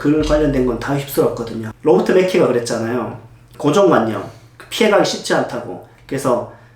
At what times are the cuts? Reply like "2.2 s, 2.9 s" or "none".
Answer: 1.6 s